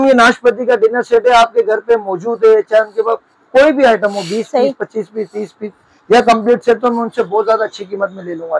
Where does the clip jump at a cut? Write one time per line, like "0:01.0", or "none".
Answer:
none